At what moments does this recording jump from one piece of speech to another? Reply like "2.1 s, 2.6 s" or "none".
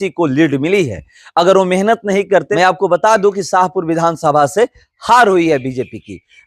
2.5 s